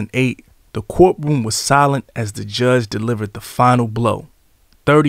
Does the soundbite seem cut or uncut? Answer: uncut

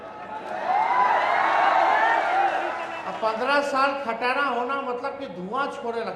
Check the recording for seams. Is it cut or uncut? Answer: uncut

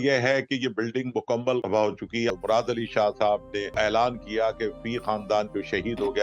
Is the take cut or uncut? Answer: cut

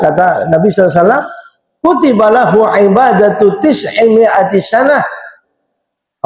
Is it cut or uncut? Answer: uncut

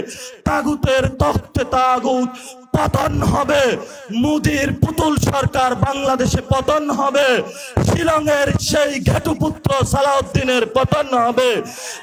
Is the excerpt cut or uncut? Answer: uncut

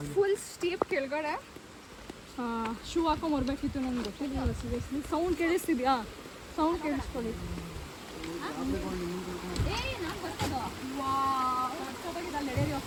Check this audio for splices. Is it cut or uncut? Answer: uncut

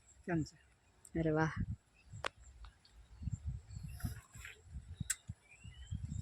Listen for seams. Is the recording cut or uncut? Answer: uncut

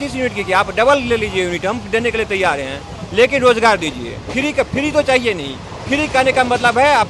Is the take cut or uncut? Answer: uncut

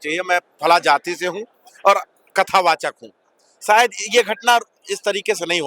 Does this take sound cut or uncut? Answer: uncut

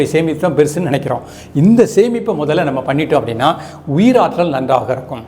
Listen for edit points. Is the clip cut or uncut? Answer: uncut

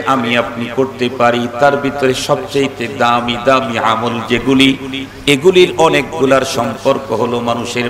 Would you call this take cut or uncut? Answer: uncut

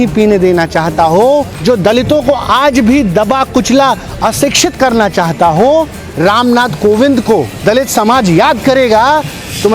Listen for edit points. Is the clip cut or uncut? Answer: cut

